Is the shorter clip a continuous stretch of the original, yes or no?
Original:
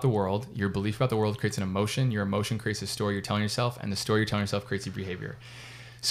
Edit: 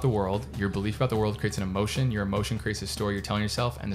yes